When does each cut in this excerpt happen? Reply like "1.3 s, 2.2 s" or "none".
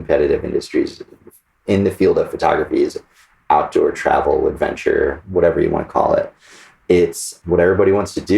1.5 s, 7.3 s